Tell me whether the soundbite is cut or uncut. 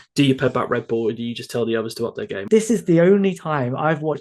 cut